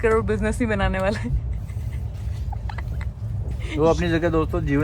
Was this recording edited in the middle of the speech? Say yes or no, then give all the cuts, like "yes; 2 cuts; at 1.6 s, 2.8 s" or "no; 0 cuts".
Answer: no; 0 cuts